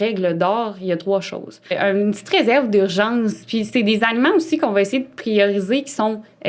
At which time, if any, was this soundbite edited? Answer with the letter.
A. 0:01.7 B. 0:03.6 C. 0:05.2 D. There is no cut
A